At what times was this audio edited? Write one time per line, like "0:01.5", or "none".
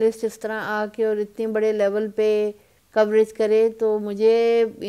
none